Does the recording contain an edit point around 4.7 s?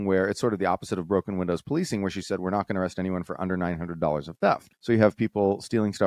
yes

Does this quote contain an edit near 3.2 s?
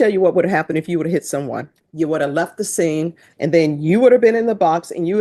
yes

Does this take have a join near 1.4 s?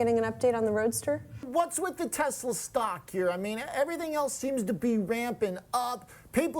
yes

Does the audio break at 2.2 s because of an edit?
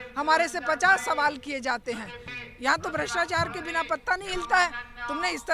yes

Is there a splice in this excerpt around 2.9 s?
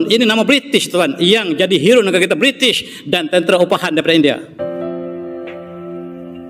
no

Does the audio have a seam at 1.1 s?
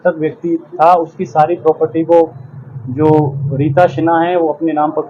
no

